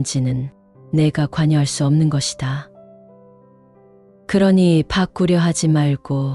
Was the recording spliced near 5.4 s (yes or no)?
no